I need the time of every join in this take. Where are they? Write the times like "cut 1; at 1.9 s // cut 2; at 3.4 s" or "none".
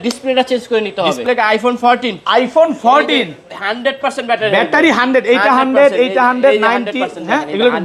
cut 1; at 1.2 s